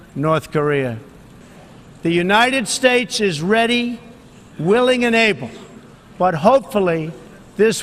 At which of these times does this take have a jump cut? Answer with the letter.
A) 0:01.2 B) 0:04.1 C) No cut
A